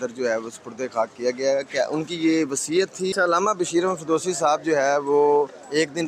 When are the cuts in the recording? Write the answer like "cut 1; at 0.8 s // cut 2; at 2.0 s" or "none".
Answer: cut 1; at 3.1 s